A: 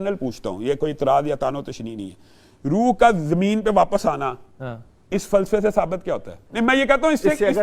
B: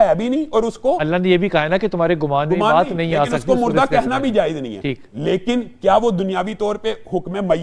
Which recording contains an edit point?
A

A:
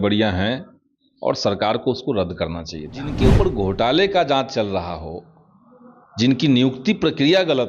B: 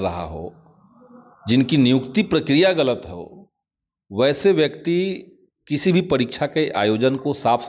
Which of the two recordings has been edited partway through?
A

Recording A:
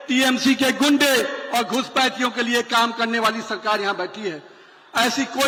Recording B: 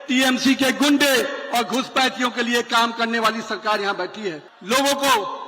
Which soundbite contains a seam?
B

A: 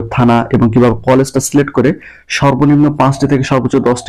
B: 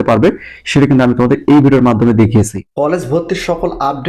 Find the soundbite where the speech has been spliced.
B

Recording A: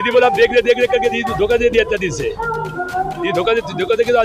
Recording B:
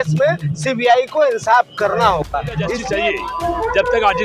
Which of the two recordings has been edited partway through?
B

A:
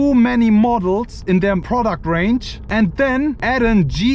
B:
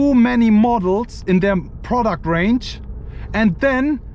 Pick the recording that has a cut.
A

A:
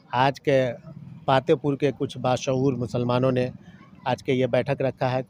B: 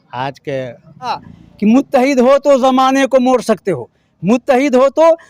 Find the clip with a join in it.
B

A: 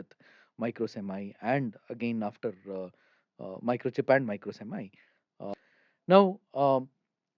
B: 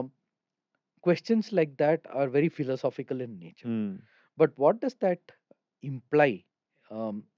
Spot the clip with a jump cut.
A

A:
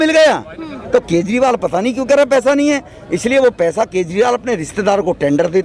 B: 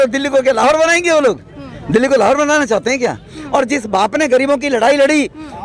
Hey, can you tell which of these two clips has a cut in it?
B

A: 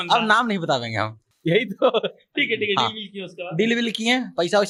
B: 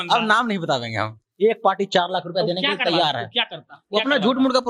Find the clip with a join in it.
B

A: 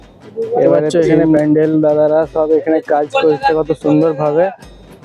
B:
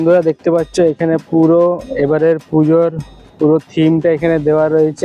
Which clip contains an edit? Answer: A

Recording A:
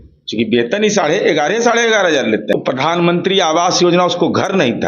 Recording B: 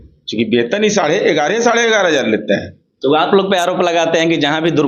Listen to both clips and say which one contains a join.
A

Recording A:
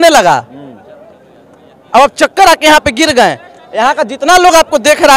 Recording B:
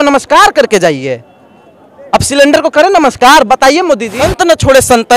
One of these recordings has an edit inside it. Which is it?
B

